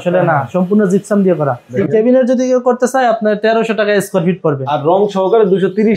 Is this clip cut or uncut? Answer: cut